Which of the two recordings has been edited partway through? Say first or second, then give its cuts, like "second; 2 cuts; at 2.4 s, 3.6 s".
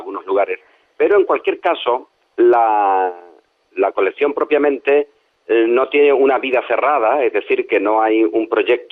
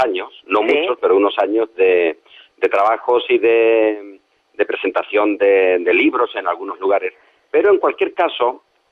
second; 1 cut; at 4.1 s